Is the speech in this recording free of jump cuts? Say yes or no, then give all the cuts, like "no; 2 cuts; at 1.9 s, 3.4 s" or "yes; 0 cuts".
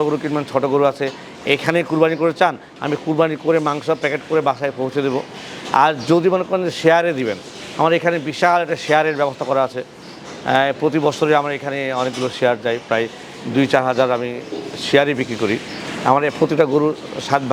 yes; 0 cuts